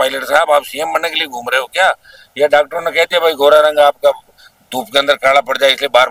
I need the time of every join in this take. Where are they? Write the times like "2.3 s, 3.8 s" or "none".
none